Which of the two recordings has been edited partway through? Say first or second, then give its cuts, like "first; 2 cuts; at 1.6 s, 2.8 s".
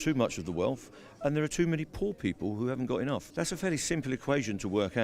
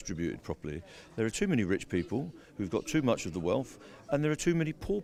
first; 1 cut; at 3.3 s